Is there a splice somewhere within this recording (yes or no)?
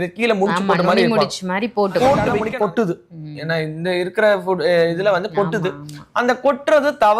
yes